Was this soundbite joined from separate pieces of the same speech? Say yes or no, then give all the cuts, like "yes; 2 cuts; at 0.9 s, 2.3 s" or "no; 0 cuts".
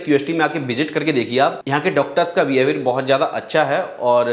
no; 0 cuts